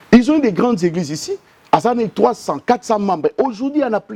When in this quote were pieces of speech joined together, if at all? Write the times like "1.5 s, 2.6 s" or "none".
none